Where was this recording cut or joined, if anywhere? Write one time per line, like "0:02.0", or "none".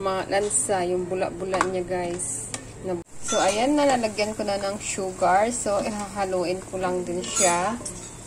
0:03.0